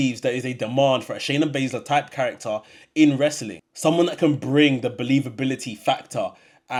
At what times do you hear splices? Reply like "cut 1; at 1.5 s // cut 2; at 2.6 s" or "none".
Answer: none